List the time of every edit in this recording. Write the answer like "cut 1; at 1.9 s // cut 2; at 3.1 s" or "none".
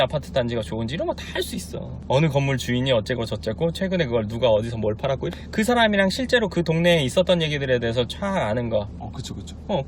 cut 1; at 1.9 s // cut 2; at 5.3 s